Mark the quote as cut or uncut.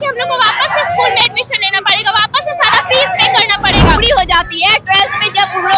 cut